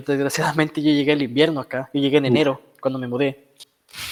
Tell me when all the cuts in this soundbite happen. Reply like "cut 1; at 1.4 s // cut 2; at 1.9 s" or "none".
none